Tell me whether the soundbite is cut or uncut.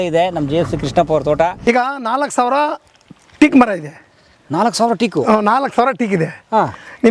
cut